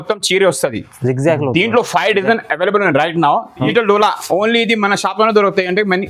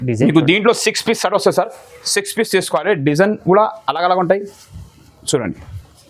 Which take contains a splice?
first; 1 cut; at 3.6 s

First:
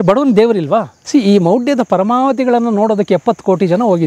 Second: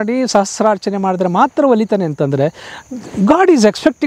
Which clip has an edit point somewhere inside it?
first; 1 cut; at 1.0 s

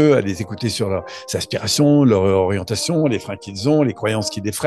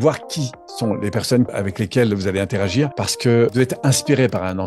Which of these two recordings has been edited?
second; 2 cuts; at 1.5 s, 3.5 s

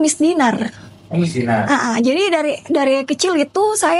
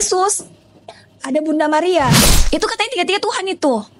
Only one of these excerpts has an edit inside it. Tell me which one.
second; 1 cut; at 2.3 s

